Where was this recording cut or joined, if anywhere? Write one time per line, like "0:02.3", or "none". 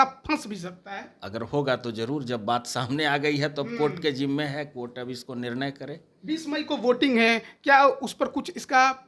none